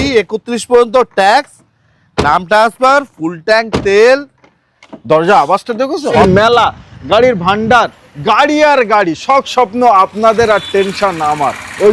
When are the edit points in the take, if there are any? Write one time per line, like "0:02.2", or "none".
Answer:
0:06.2